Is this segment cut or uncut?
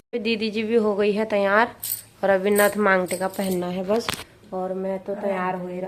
uncut